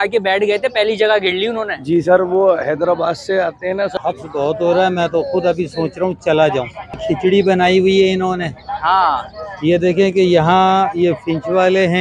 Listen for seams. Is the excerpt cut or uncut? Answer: cut